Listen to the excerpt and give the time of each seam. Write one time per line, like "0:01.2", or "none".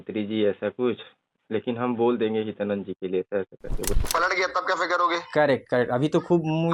0:03.9